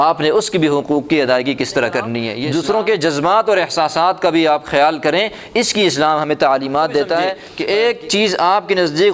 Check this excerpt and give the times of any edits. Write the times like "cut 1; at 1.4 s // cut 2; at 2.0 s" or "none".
cut 1; at 2.4 s // cut 2; at 7.5 s